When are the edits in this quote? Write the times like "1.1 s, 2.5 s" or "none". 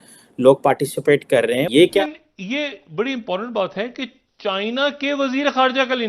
2.0 s